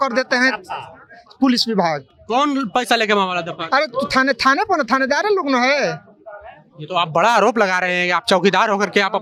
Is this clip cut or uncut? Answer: uncut